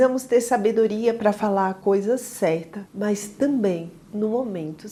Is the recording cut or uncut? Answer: uncut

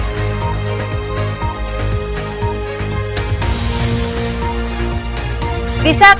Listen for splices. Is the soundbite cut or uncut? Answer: cut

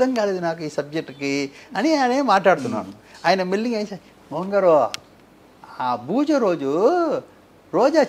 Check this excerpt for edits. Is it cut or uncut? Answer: uncut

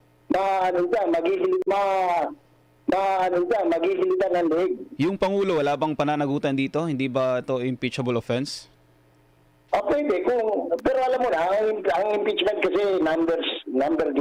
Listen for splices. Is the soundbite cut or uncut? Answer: uncut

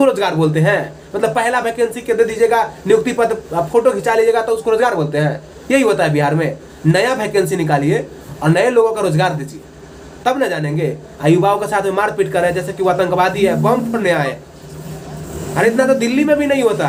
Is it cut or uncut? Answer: uncut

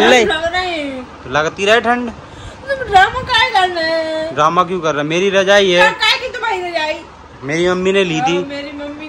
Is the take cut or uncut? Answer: uncut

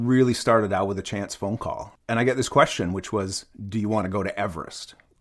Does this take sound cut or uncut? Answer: cut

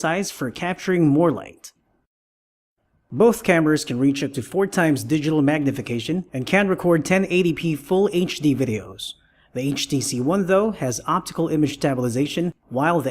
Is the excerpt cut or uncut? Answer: cut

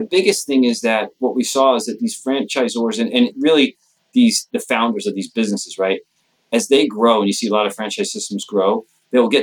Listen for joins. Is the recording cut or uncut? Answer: uncut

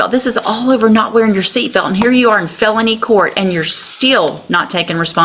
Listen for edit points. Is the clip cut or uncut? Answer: uncut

